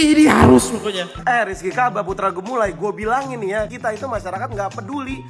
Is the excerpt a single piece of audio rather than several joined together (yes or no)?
no